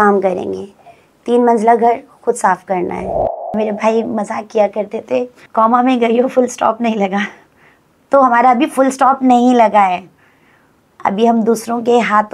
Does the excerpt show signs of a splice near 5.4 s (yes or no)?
yes